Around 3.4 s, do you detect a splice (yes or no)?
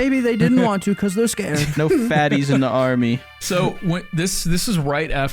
yes